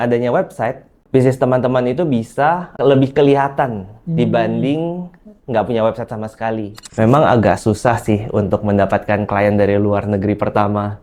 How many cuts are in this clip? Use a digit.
1